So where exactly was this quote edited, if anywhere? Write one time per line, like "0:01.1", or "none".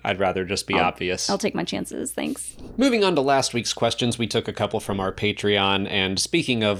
none